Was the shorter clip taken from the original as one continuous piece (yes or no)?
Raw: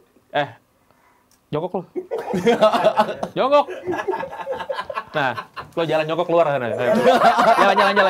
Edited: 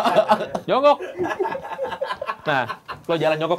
yes